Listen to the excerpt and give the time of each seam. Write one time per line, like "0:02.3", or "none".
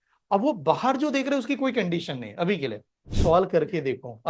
0:03.0